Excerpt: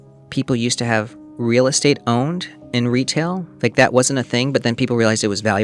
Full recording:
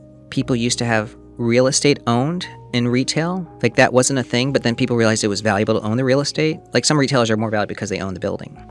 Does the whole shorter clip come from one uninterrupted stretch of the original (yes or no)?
yes